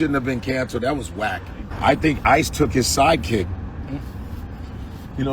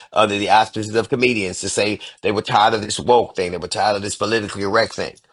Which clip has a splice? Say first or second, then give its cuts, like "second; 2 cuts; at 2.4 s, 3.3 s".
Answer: first; 1 cut; at 1.6 s